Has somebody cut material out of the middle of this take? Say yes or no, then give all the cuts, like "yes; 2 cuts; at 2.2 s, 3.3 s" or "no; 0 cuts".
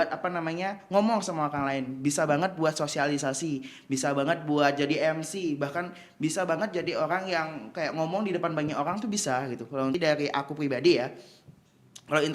yes; 1 cut; at 9.9 s